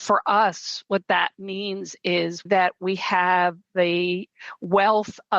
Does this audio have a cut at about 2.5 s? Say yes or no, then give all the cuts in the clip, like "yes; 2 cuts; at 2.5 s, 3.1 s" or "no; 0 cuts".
yes; 1 cut; at 2.5 s